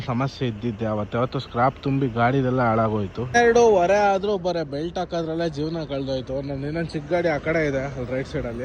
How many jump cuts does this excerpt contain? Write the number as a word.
one